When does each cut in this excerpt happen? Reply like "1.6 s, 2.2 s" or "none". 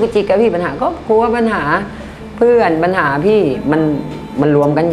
none